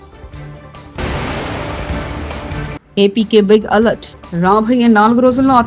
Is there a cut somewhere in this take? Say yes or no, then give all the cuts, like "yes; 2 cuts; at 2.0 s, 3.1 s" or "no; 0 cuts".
yes; 2 cuts; at 1.0 s, 2.5 s